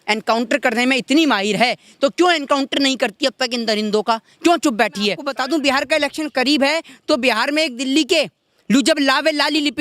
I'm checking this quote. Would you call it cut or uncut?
cut